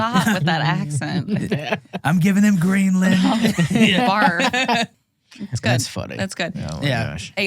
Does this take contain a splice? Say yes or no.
yes